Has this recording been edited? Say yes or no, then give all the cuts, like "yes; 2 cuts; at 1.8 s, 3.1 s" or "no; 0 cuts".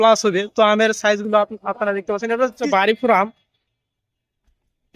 yes; 1 cut; at 2.6 s